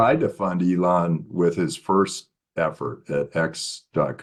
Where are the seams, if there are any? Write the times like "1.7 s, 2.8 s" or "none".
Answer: none